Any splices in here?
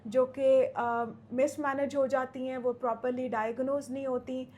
no; 0 cuts

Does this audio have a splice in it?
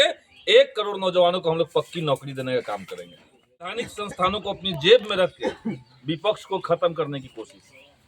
yes; 1 cut; at 3.7 s

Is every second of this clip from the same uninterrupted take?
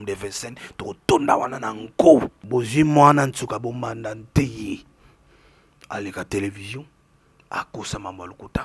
no; 1 cut; at 2.4 s

